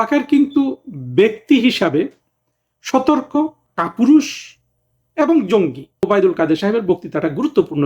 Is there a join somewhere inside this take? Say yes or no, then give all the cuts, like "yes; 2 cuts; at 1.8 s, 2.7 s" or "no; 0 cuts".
yes; 1 cut; at 6.1 s